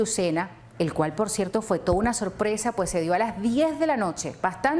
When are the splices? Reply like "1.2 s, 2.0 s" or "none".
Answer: 1.3 s

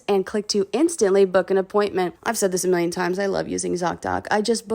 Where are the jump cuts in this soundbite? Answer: 2.2 s

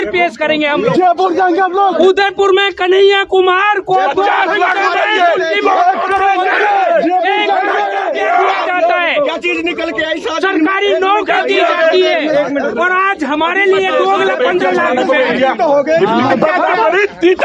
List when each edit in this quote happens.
2.0 s, 16.4 s

